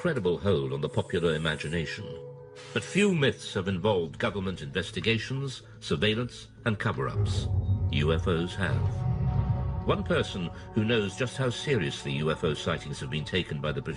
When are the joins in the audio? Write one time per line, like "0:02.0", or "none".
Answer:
none